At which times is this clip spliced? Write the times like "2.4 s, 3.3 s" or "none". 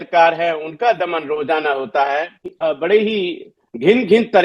2.4 s